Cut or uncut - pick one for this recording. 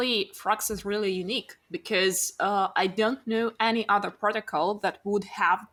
uncut